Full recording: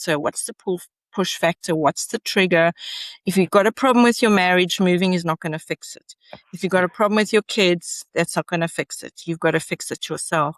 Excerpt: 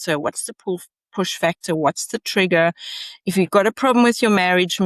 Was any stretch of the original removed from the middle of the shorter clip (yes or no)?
no